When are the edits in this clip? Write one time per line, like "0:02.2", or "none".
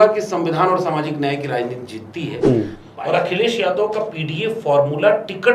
0:02.8